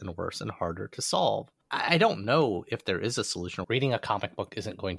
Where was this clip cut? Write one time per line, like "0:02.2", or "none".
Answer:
0:01.6
0:03.6

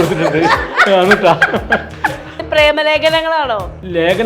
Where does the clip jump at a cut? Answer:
0:02.3

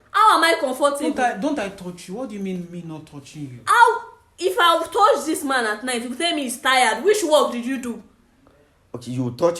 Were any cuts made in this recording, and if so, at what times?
none

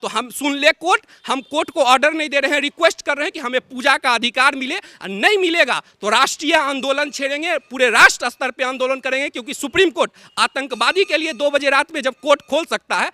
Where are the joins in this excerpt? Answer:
none

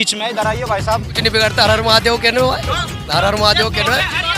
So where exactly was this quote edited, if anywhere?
0:01.2

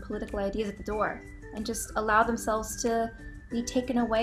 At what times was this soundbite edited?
none

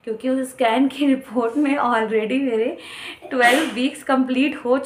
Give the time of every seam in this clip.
none

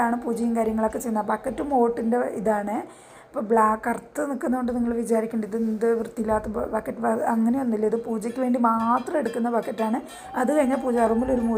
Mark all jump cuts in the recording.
none

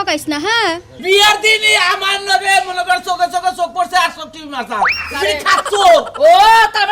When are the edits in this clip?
0:01.0

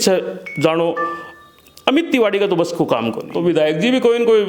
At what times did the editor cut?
0:03.2

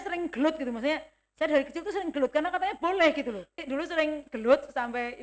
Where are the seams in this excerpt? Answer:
0:03.6

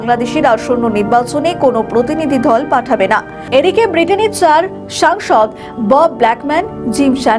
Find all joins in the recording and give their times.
0:03.3

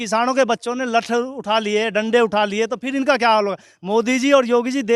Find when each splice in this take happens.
none

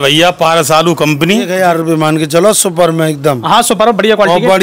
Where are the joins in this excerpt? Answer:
0:01.5

